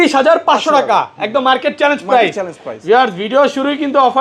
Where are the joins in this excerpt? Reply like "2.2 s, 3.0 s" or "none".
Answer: none